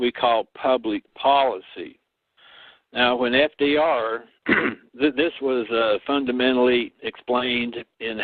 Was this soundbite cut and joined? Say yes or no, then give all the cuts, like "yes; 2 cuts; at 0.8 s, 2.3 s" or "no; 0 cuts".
no; 0 cuts